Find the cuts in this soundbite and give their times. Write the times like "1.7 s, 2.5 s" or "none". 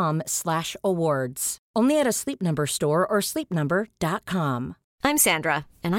4.8 s